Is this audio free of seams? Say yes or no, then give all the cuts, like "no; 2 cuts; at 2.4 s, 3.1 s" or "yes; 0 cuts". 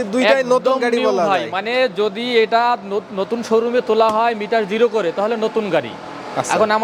yes; 0 cuts